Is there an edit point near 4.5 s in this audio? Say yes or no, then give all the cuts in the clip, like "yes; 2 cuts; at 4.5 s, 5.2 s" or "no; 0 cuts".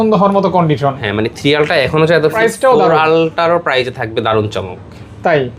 no; 1 cut; at 2.4 s